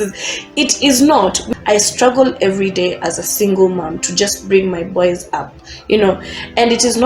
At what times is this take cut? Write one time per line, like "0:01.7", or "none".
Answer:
0:01.4